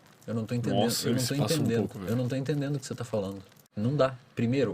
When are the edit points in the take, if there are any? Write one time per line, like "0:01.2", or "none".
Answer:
0:03.6